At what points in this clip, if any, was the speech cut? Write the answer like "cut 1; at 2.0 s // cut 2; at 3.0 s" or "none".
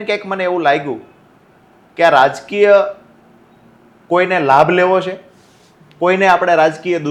none